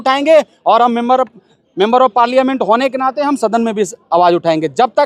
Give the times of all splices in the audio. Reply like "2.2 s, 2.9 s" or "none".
none